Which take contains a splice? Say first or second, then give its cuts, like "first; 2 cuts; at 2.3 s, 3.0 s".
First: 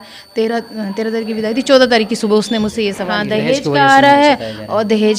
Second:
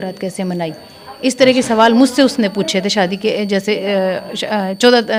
first; 1 cut; at 3.1 s